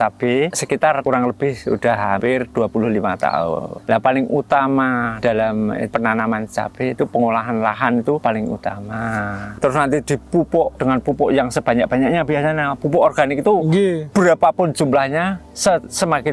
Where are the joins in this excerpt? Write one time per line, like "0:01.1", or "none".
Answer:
0:00.7
0:02.2
0:03.7
0:05.1
0:05.9
0:08.2
0:09.5
0:10.7
0:14.0